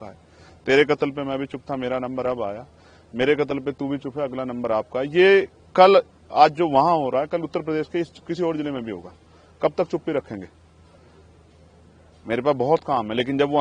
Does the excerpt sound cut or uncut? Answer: uncut